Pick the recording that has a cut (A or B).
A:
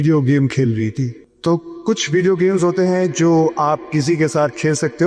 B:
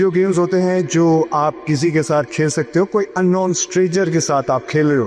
A